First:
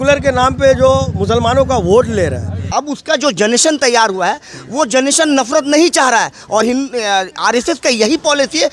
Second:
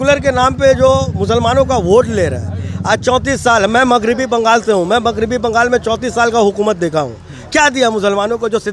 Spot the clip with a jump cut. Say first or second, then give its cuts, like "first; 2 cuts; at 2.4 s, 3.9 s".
first; 1 cut; at 2.7 s